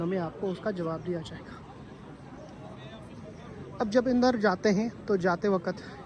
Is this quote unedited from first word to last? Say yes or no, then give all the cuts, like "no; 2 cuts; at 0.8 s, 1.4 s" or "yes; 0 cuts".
yes; 0 cuts